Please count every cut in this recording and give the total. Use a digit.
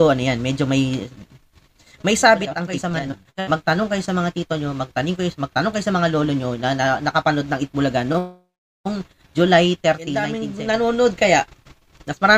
2